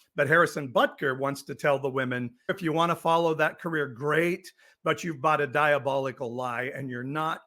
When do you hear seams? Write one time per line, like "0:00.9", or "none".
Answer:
0:02.6